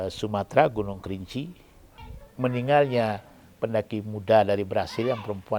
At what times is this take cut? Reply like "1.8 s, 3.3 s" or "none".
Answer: 2.0 s